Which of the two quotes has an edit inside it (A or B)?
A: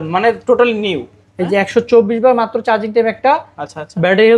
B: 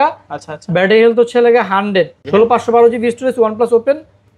B